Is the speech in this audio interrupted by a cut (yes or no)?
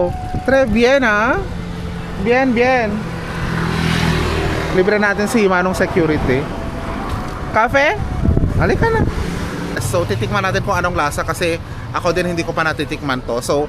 yes